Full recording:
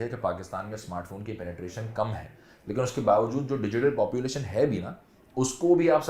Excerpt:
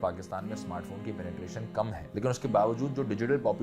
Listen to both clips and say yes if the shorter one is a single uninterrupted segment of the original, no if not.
no